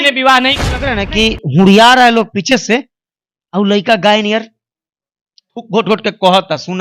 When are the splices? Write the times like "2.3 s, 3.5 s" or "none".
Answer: 1.0 s